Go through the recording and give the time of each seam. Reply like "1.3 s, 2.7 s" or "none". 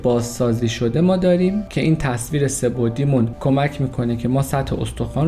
1.7 s, 3.3 s